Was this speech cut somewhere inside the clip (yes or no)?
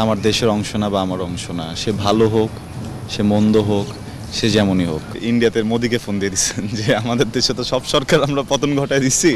yes